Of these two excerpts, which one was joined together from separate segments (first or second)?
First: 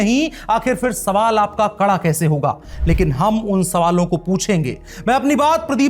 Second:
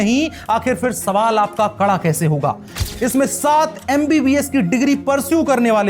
second